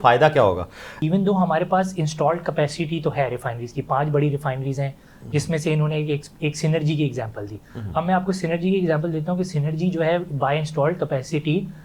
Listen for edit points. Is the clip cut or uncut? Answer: cut